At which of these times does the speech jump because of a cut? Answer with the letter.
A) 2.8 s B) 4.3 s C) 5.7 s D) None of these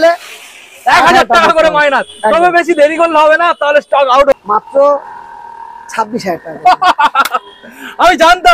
B